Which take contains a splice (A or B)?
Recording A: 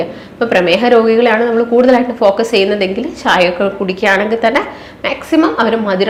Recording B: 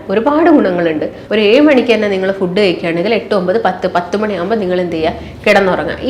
B